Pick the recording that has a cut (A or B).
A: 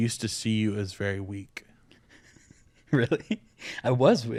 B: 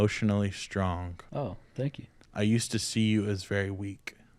B